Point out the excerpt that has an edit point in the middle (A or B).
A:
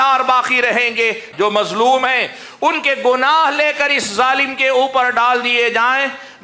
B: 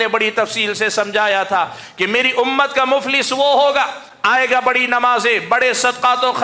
A